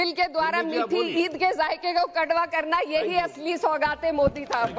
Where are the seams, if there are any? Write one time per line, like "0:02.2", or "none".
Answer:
none